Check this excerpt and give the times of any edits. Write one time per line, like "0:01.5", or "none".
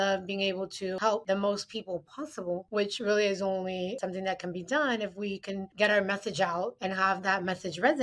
0:01.1
0:04.0
0:06.8